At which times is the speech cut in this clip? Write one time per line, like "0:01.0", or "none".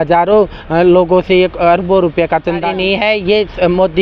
0:02.7